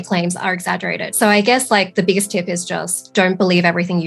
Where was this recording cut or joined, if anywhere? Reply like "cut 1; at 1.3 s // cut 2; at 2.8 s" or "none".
cut 1; at 1.0 s